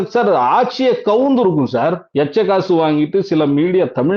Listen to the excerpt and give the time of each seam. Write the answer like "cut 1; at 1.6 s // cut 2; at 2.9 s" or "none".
cut 1; at 2.0 s